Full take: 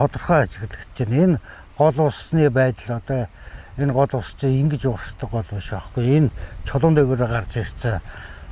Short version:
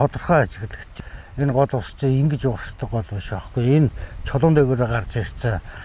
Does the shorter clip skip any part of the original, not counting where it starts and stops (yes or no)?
yes